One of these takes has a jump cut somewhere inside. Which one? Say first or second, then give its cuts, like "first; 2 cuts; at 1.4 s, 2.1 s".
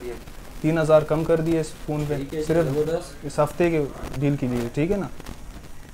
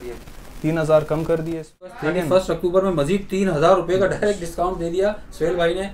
second; 1 cut; at 2.0 s